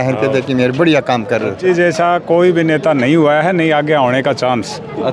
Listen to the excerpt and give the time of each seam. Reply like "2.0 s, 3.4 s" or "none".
1.6 s